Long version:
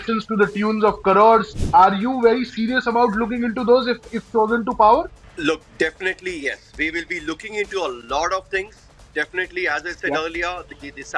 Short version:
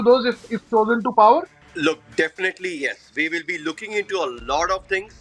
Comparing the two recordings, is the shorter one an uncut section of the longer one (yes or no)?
yes